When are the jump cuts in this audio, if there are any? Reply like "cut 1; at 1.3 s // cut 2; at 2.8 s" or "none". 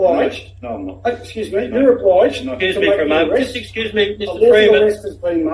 none